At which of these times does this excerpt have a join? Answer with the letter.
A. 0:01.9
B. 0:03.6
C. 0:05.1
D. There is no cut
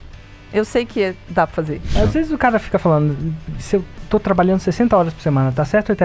A